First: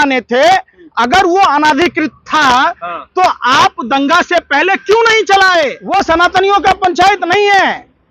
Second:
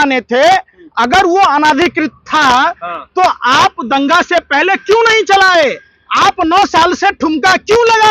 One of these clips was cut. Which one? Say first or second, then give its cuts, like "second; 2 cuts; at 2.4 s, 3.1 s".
first; 1 cut; at 5.8 s